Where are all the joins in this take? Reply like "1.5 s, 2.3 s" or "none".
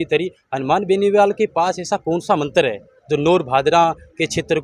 none